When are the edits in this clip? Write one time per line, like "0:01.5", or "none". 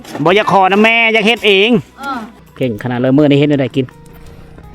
0:02.3